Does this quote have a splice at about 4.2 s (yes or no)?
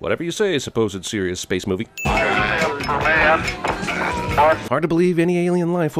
yes